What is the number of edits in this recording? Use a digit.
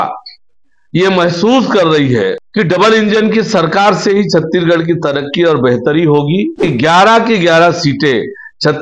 2